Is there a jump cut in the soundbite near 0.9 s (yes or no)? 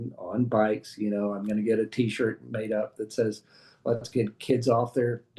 no